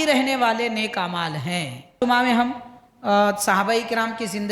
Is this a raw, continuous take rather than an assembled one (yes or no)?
no